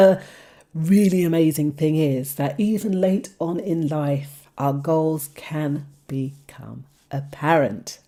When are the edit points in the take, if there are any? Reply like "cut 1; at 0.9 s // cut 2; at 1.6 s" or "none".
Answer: none

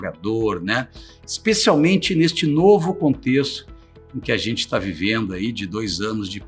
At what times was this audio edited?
none

